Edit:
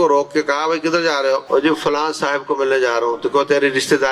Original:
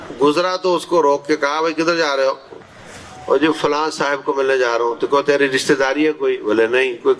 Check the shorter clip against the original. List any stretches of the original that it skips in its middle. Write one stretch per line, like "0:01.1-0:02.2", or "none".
0:02.4-0:03.2